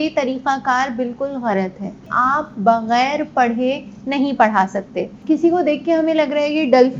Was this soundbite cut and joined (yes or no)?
yes